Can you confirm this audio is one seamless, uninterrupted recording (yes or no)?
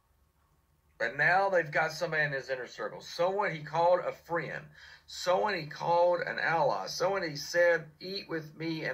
yes